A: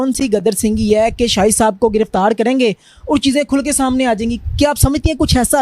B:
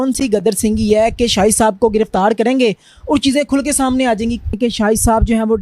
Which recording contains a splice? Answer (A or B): B